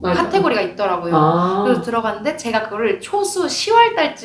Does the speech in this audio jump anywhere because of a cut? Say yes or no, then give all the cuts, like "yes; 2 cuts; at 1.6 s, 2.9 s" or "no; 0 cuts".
no; 0 cuts